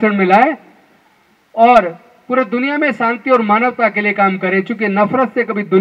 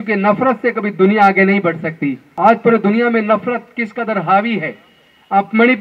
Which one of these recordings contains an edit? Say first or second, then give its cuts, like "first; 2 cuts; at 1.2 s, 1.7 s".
second; 1 cut; at 2.2 s